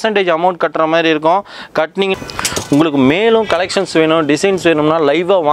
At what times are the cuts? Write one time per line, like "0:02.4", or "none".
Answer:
0:02.1